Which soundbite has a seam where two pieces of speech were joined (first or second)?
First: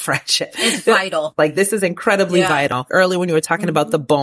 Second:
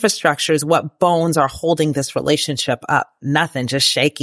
first